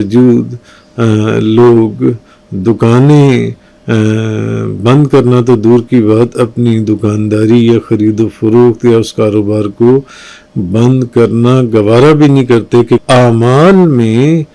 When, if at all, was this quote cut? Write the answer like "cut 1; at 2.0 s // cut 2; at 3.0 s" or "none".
cut 1; at 13.0 s